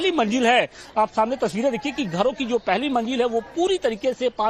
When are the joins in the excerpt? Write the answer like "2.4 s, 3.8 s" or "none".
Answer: none